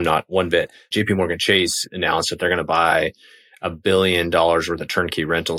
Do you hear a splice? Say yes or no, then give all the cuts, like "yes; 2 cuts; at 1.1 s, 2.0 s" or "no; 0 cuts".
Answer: yes; 1 cut; at 0.9 s